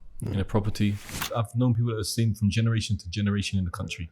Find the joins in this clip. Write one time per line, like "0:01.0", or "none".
0:01.2